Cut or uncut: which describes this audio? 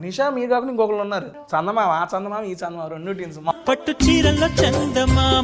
cut